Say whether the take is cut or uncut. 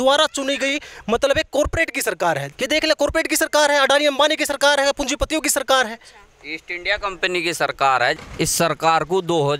cut